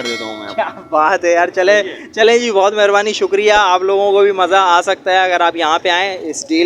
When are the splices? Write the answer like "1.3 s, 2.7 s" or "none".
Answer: none